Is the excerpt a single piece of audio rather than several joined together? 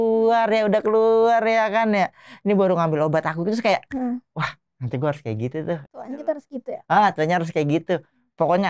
yes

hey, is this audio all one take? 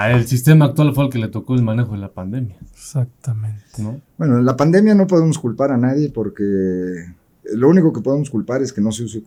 yes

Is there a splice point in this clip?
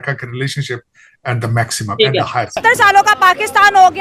yes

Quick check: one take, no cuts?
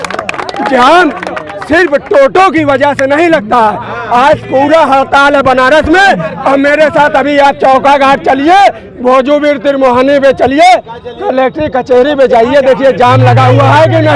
yes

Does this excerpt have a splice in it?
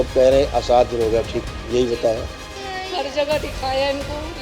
yes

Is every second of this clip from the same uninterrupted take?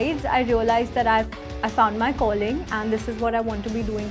yes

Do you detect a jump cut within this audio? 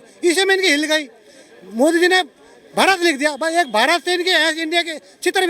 no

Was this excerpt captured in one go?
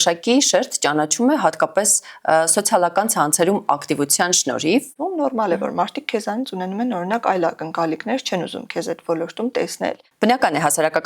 no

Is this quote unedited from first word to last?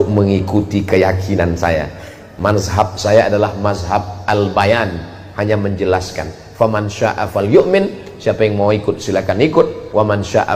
yes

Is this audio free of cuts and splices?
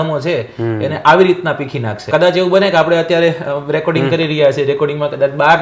no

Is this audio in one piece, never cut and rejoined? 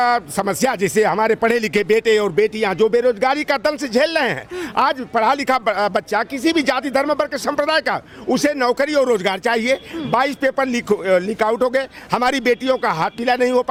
yes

